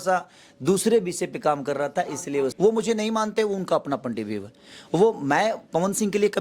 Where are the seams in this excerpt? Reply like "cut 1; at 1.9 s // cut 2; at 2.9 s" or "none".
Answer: cut 1; at 2.5 s